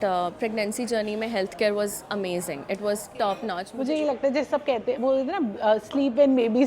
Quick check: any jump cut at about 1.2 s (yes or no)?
no